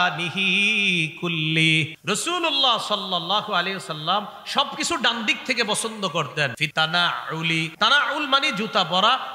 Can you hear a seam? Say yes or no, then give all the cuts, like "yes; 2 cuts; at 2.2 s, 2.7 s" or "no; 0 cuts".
yes; 3 cuts; at 2.0 s, 6.6 s, 7.7 s